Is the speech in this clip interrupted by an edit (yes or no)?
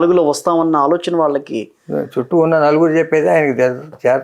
no